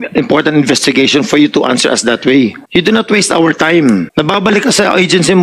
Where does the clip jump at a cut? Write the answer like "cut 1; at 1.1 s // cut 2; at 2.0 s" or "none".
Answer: cut 1; at 2.6 s // cut 2; at 4.1 s